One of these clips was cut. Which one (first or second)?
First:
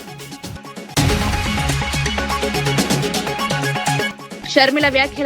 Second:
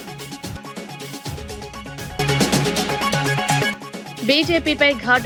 first